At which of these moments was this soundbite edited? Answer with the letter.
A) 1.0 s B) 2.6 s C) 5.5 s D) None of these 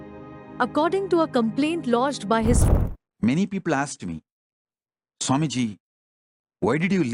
B